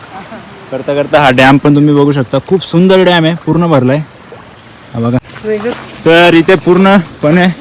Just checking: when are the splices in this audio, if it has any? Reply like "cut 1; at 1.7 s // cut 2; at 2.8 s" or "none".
cut 1; at 5.3 s